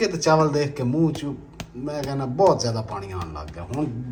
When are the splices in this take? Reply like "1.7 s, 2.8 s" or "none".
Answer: none